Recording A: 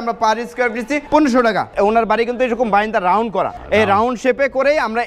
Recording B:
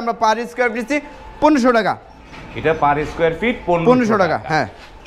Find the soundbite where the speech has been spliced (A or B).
A